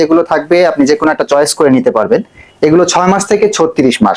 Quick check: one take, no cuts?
yes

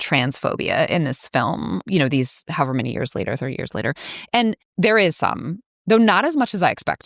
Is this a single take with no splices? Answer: no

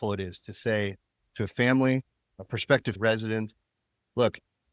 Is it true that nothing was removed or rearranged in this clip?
no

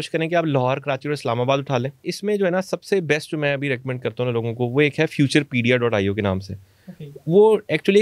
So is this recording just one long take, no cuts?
no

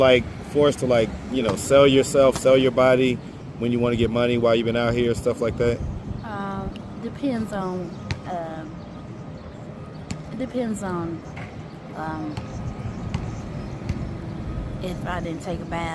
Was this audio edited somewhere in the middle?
no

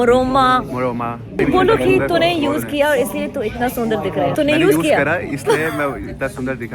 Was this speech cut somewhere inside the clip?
yes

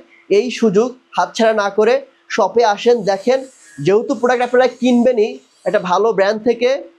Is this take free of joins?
yes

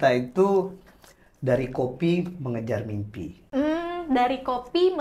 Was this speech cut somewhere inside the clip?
no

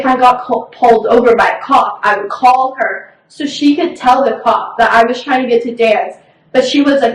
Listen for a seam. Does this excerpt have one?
no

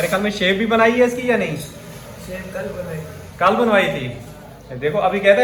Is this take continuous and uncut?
yes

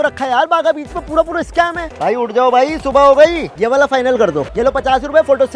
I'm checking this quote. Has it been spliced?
yes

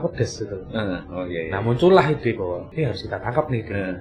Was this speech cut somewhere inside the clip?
yes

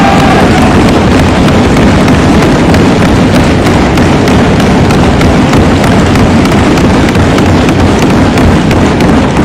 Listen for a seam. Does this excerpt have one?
no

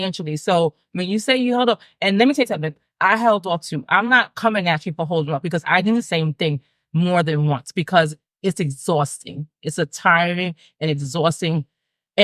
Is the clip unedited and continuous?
yes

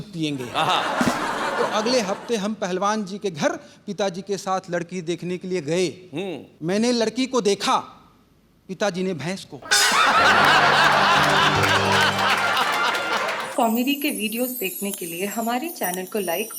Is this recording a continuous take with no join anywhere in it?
no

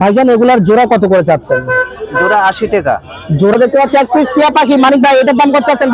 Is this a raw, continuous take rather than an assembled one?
no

